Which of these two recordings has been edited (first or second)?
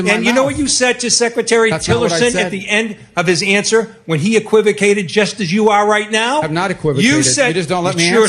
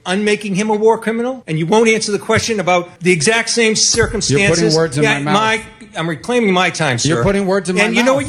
second